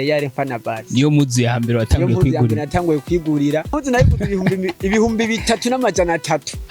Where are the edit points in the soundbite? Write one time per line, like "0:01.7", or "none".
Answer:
0:03.8